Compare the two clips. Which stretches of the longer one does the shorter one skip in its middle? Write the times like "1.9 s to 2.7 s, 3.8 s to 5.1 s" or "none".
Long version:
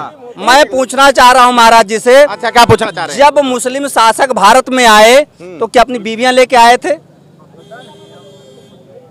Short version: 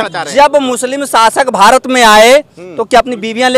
none